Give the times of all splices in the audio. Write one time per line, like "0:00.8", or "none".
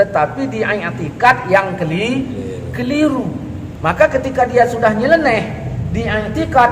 0:03.6